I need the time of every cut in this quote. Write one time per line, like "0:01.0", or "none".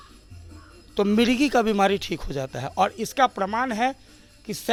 none